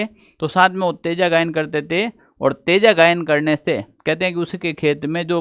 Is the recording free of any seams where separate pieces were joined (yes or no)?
yes